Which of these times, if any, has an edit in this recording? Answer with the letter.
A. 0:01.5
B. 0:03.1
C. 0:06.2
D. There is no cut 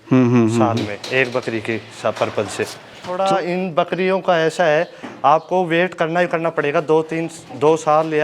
B